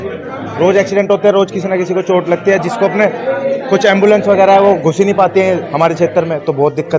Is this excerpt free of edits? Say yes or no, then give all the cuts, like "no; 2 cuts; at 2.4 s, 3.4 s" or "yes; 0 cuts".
yes; 0 cuts